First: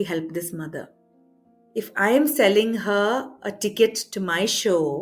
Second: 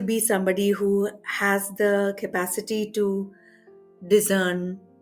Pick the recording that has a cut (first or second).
first